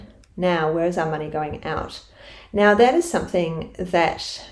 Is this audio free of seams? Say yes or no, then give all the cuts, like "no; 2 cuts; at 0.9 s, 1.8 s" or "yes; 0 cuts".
yes; 0 cuts